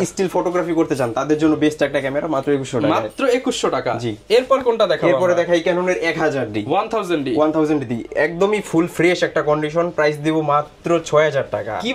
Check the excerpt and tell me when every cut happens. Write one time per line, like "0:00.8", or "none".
none